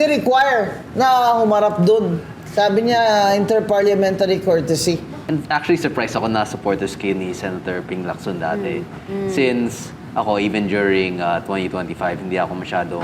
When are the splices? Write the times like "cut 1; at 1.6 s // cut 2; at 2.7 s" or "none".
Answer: cut 1; at 5.1 s